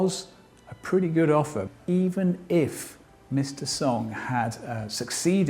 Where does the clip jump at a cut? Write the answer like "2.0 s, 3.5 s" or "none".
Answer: 1.7 s